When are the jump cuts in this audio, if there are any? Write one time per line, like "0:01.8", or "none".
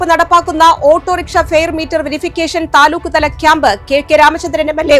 none